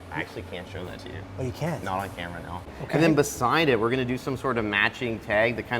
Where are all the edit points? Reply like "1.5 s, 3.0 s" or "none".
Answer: 2.8 s